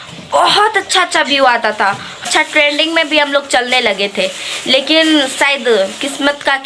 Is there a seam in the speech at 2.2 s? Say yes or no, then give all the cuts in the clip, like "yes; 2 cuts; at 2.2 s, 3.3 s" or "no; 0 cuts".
yes; 1 cut; at 2.2 s